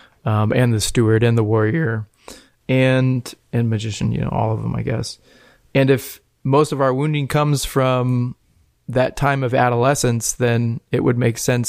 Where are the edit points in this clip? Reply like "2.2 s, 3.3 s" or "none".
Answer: none